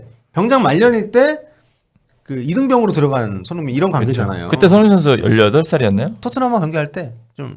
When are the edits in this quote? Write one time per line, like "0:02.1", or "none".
0:06.2

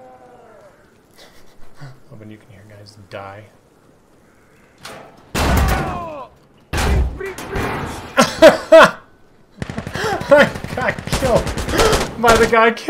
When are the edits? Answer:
none

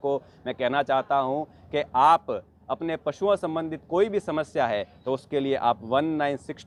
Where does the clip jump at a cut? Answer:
none

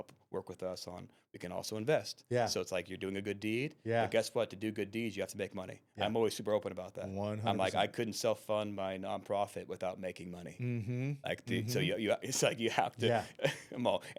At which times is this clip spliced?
none

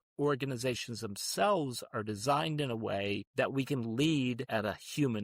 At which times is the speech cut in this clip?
0:03.2
0:04.4

